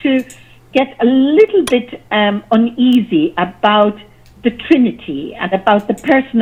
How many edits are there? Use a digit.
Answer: 0